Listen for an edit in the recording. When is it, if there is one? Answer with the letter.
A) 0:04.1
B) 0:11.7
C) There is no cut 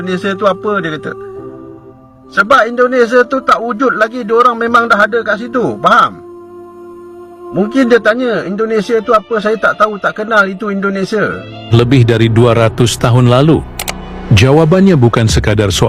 B